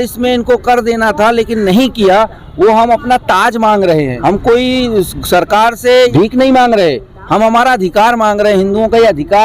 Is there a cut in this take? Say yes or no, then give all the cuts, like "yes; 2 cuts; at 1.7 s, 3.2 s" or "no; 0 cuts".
yes; 2 cuts; at 4.1 s, 6.1 s